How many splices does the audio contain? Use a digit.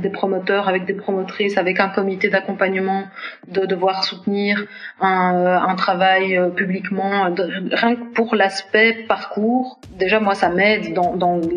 1